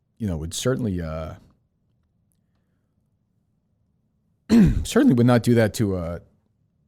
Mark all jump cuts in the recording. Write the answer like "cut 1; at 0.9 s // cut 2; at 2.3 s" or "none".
none